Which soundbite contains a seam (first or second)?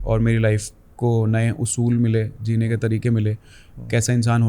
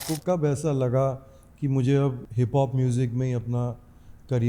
second